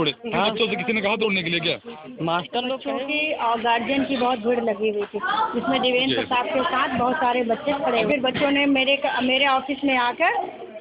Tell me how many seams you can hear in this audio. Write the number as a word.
one